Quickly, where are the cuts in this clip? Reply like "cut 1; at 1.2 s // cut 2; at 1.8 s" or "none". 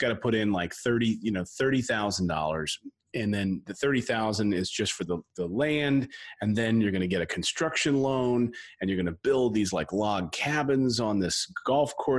none